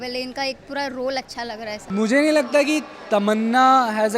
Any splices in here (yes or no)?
yes